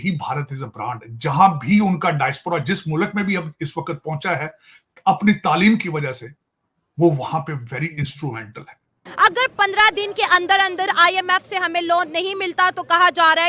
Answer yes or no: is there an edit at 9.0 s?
yes